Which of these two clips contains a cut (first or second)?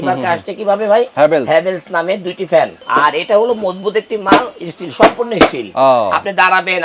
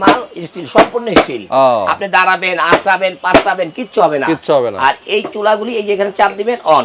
first